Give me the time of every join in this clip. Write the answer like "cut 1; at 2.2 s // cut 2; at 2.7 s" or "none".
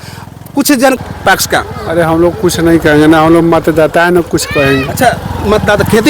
cut 1; at 1.0 s